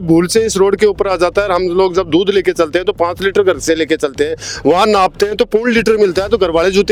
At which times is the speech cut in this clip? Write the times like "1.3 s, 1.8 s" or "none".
none

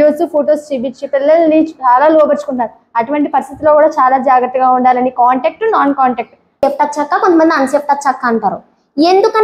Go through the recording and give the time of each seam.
6.6 s

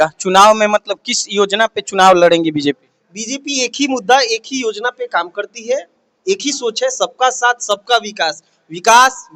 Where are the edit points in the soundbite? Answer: none

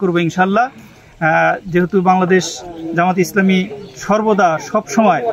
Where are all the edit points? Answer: none

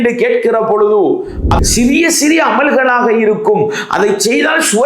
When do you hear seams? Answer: 1.5 s

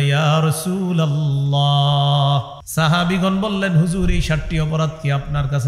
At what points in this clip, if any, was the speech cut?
2.6 s

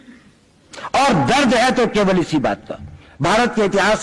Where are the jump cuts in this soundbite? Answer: none

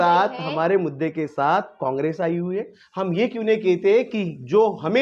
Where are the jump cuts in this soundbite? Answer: 2.8 s

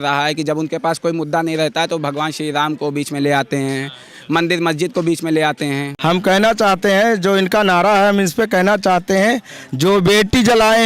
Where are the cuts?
5.9 s

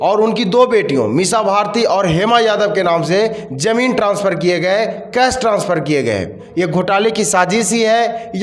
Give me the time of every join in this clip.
6.4 s

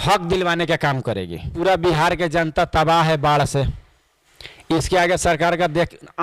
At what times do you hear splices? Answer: 1.5 s

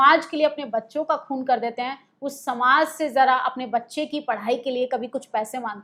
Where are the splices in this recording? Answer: none

